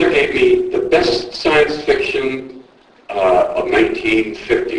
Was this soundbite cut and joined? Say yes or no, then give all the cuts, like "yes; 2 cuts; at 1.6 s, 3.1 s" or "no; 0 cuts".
no; 0 cuts